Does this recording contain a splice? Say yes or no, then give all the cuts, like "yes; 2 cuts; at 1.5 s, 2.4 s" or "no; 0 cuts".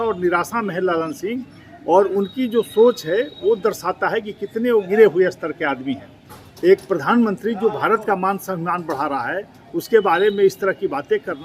no; 0 cuts